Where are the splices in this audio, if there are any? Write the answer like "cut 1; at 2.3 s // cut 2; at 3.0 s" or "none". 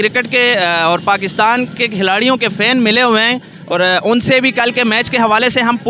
none